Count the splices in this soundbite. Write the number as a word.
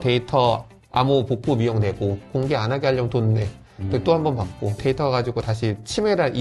two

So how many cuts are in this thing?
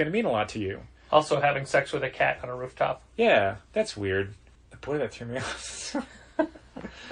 zero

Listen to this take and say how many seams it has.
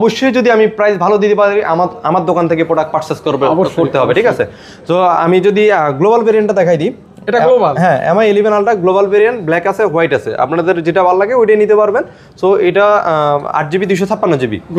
zero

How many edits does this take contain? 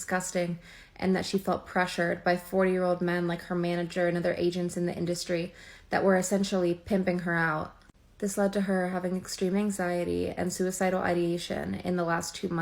one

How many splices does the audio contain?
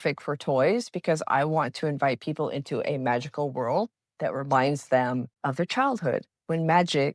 one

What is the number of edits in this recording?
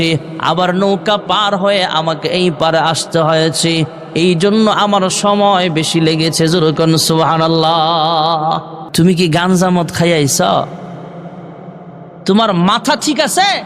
one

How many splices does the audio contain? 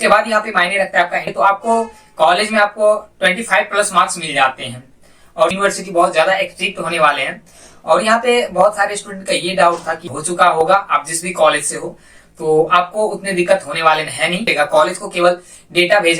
four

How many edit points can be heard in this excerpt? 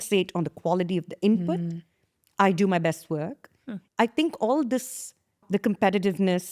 two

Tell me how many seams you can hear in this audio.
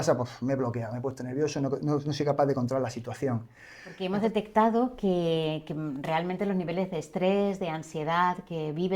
one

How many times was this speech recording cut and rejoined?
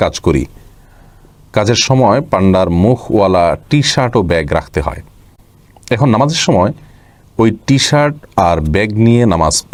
zero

